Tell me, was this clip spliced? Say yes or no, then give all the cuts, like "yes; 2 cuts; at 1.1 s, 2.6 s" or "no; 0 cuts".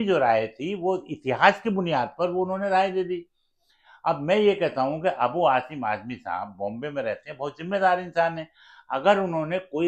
no; 0 cuts